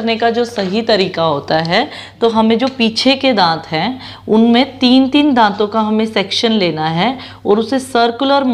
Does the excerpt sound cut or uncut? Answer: uncut